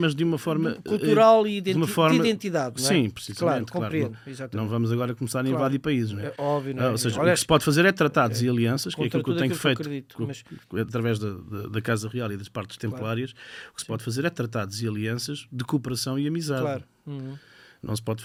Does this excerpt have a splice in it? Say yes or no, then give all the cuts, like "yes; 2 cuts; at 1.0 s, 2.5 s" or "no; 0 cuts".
no; 0 cuts